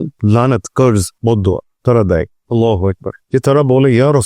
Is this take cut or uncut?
cut